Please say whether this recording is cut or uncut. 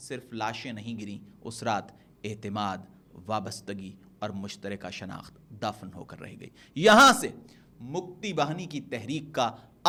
uncut